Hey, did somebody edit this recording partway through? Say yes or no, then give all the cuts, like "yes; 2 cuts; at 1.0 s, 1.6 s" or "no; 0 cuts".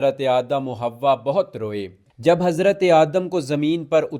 yes; 1 cut; at 2.1 s